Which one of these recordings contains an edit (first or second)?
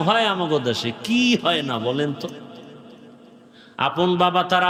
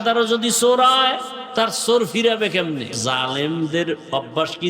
second